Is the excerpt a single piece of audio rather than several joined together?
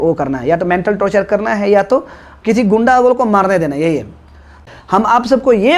no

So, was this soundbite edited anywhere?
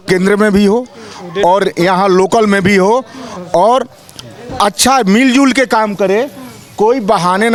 no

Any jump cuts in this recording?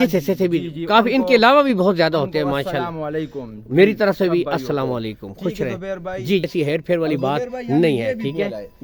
yes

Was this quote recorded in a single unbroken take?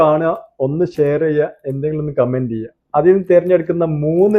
yes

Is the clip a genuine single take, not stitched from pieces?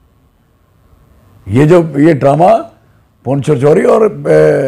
yes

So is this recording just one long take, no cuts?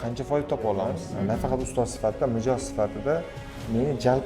no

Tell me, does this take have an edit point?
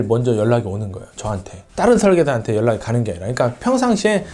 no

